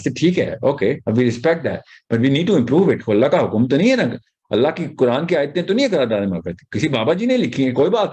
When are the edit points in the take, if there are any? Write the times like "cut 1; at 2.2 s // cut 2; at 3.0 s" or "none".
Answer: none